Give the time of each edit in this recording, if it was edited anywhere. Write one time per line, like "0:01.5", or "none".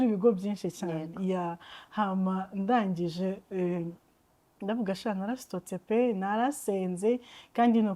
none